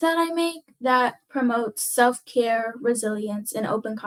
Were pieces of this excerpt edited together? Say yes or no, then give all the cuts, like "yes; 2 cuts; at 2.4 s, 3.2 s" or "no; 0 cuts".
no; 0 cuts